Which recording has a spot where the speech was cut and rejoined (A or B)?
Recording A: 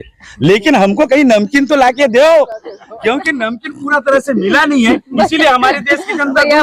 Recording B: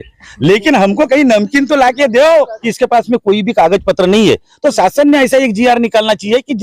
B